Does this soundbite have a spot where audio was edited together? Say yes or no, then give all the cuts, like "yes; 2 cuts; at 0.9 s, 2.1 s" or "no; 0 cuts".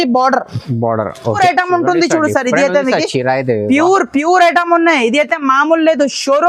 yes; 1 cut; at 1.4 s